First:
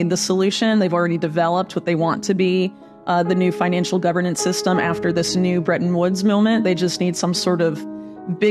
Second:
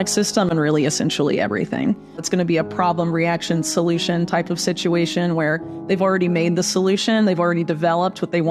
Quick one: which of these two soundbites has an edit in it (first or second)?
second